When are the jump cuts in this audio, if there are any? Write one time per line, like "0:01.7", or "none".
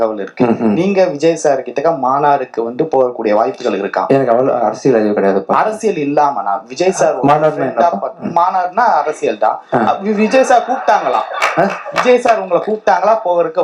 none